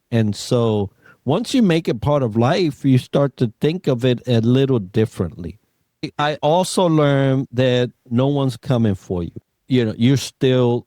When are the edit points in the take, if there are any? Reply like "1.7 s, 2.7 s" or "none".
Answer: 6.1 s, 9.4 s